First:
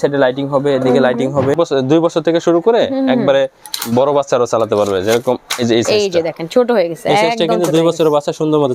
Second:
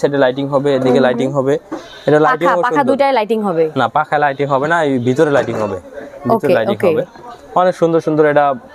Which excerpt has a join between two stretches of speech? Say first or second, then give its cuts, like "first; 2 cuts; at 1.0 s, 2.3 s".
first; 1 cut; at 1.6 s